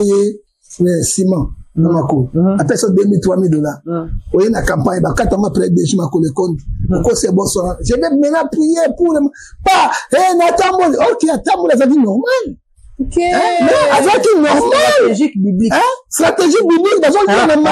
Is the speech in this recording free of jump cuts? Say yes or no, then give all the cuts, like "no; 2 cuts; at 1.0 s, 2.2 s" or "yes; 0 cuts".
yes; 0 cuts